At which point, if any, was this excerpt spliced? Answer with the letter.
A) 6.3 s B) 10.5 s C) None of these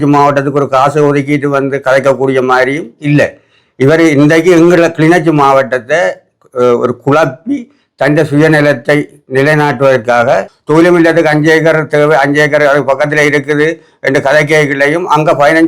B